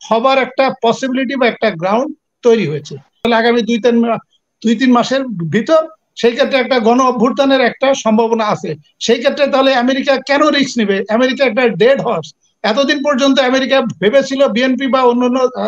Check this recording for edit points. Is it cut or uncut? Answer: cut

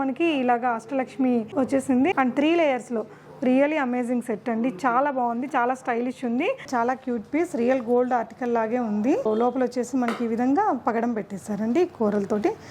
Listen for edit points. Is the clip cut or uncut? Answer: cut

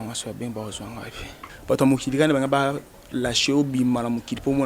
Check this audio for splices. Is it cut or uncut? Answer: cut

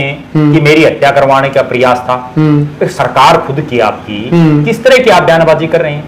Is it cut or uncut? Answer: uncut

